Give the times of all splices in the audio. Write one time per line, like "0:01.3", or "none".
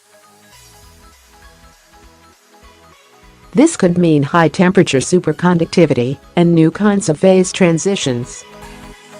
0:03.5
0:08.3